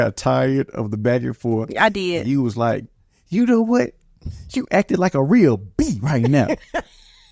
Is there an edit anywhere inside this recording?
no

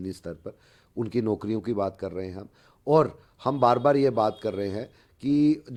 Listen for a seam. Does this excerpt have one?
no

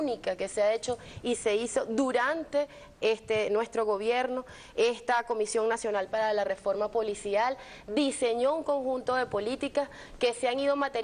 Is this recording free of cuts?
yes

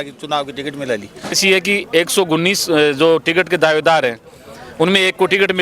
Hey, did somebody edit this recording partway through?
yes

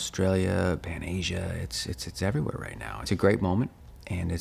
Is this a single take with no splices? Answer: no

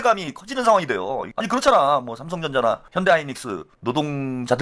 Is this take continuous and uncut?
no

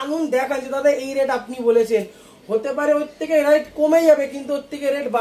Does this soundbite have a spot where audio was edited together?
no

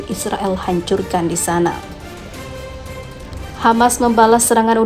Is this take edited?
yes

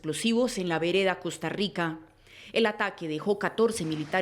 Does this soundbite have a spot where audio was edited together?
yes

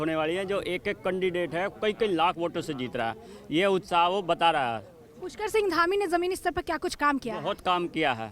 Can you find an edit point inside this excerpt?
no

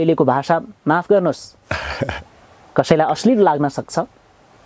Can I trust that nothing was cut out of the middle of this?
yes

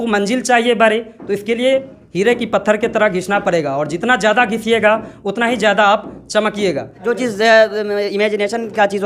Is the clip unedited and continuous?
no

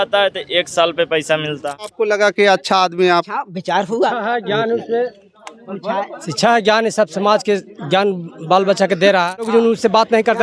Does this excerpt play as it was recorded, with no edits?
no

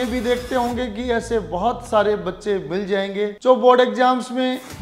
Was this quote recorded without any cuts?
no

